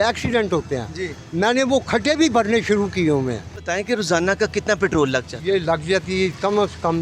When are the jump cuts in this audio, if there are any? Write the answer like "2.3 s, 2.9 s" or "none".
3.5 s